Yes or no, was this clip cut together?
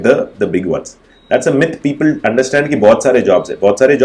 no